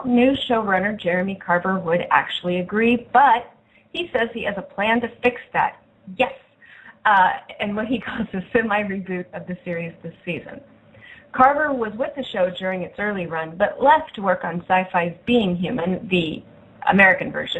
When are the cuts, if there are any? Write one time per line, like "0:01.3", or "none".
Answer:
0:16.5